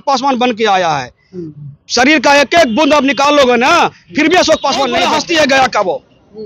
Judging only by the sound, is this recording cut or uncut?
cut